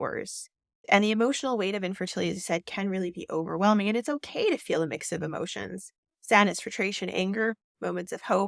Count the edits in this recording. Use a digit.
0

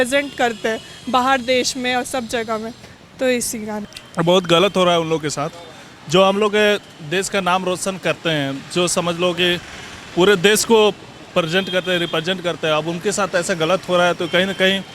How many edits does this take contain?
0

